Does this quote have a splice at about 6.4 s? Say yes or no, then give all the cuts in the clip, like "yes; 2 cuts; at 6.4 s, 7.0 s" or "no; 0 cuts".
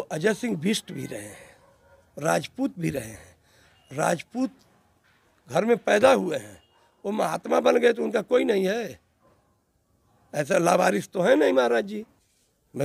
no; 0 cuts